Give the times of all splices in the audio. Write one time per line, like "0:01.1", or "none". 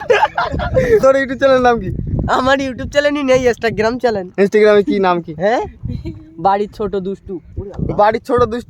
0:01.0

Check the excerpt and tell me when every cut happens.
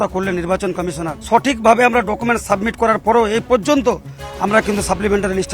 0:01.1

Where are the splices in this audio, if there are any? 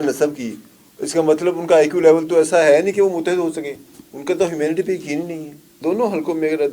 0:05.8

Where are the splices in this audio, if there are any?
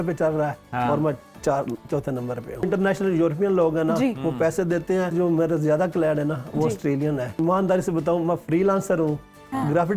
0:02.7
0:05.1
0:07.3

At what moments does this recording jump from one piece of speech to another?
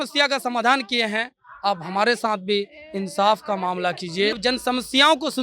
0:04.4

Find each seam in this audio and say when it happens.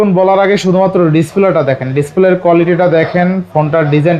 none

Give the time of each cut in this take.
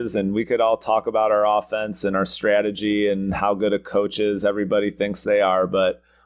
none

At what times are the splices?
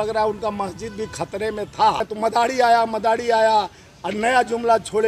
0:02.1

